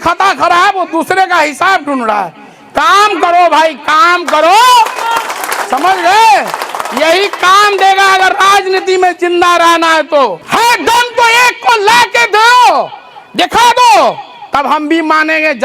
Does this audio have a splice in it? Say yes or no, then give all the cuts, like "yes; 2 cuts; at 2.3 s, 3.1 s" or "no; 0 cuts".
yes; 1 cut; at 10.4 s